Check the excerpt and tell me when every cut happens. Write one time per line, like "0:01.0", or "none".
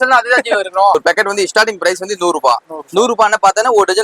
0:01.0